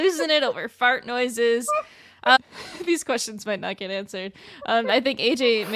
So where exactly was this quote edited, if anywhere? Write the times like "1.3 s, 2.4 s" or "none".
2.4 s